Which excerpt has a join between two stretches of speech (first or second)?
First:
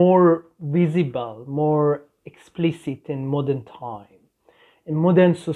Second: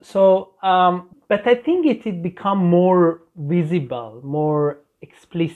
second